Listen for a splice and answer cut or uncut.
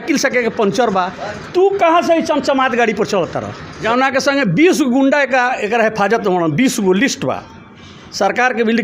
cut